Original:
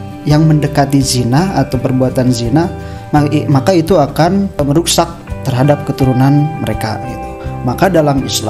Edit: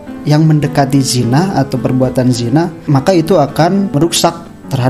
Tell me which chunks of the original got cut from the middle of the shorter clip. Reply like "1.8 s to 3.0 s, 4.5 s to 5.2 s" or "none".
2.8 s to 3.4 s, 4.5 s to 4.7 s